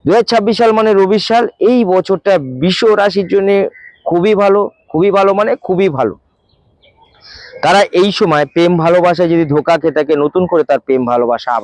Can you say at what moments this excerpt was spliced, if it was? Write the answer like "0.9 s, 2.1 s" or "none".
none